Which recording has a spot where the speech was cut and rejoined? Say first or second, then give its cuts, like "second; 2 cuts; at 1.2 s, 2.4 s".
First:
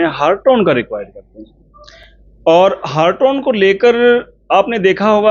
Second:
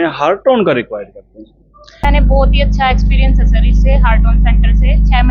second; 1 cut; at 2.0 s